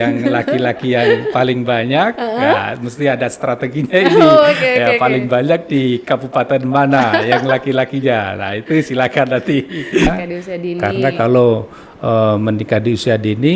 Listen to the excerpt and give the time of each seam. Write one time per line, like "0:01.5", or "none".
0:10.1